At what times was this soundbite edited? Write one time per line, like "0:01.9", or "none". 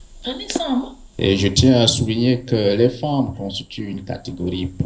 0:01.0